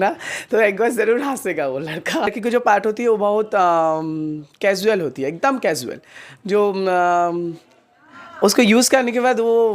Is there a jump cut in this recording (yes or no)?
yes